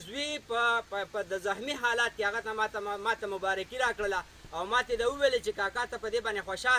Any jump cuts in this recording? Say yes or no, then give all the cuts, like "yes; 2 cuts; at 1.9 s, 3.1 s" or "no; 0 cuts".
no; 0 cuts